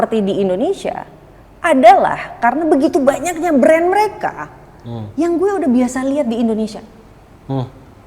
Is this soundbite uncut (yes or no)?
yes